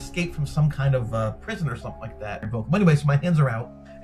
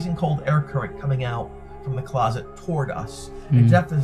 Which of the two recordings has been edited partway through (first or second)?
first